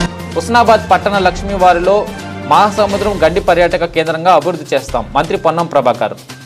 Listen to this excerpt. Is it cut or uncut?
uncut